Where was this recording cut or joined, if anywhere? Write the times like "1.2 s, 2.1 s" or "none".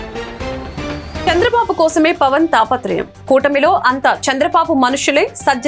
none